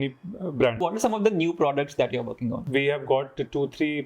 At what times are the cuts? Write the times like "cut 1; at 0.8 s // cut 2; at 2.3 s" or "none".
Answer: cut 1; at 0.8 s // cut 2; at 2.6 s